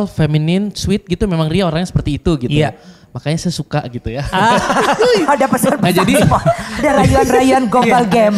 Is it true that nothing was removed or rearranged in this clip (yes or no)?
yes